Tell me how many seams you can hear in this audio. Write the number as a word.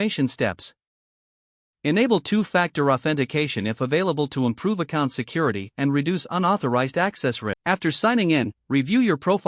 one